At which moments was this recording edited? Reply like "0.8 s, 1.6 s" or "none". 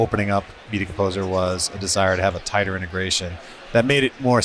none